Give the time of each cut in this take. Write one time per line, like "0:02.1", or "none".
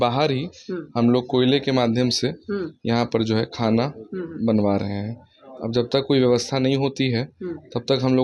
none